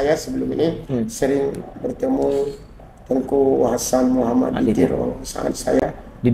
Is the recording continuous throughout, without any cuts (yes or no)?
yes